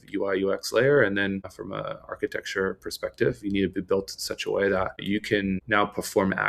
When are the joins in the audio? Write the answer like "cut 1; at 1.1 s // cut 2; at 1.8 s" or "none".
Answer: cut 1; at 1.6 s // cut 2; at 5.2 s